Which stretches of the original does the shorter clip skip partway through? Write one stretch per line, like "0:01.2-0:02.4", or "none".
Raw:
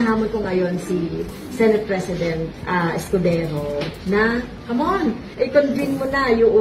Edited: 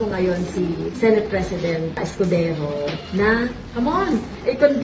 0:01.2-0:01.4
0:02.6-0:02.9